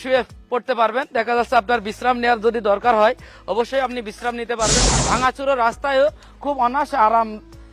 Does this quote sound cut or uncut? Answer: cut